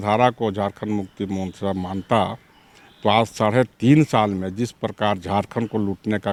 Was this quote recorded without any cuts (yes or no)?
yes